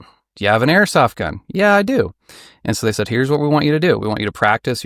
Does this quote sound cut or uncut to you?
uncut